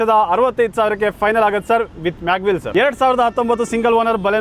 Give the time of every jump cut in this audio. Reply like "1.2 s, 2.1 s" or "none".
2.7 s